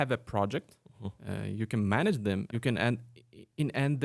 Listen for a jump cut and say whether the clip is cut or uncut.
cut